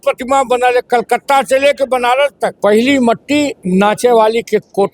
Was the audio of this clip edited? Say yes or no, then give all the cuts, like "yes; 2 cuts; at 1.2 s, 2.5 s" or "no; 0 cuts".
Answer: yes; 2 cuts; at 2.6 s, 3.6 s